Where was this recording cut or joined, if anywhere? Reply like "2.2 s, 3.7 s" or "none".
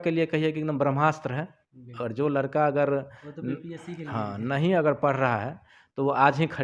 none